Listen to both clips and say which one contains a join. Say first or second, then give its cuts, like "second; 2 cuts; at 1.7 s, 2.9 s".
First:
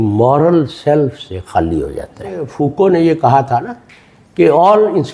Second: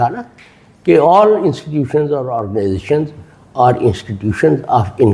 first; 1 cut; at 2.5 s